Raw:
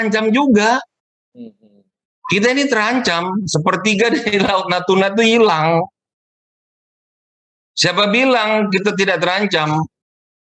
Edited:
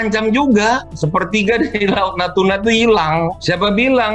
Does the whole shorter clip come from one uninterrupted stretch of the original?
no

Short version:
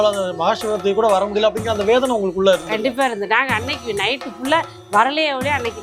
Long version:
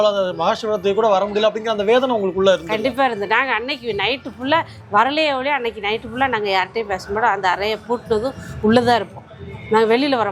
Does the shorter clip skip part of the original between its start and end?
no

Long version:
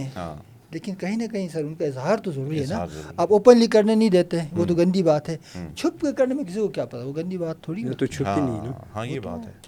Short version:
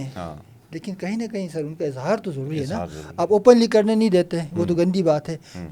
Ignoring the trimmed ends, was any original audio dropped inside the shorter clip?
no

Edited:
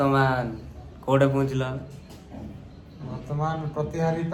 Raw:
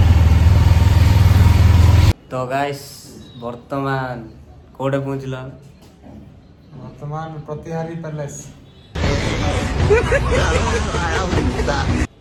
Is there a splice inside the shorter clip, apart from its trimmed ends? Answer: no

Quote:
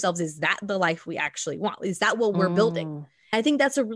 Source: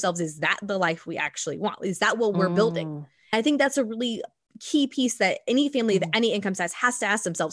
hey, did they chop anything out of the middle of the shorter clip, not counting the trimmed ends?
no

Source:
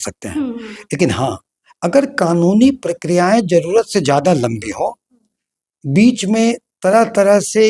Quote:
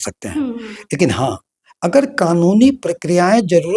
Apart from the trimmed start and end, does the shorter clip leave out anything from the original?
no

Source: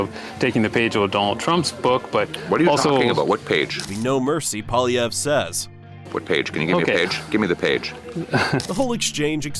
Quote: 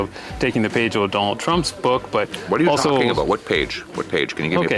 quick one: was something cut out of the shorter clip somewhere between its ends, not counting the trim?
yes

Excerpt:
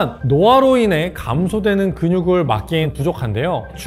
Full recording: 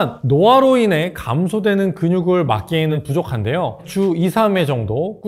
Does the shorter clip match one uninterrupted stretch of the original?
no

